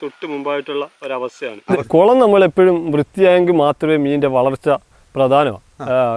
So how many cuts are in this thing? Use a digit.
1